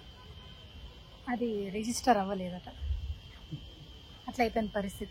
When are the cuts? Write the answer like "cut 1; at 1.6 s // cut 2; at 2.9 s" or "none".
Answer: none